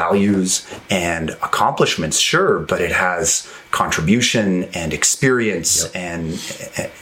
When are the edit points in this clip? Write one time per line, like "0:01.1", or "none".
0:02.6